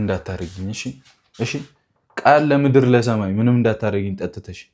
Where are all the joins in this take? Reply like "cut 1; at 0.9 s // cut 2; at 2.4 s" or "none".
none